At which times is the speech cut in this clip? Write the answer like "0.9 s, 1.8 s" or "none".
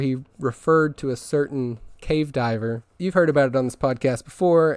1.9 s, 2.9 s